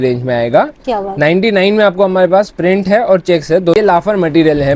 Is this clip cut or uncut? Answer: cut